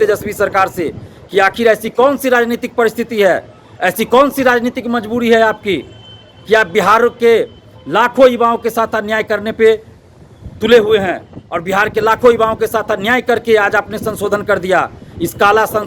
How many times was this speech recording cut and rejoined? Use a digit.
0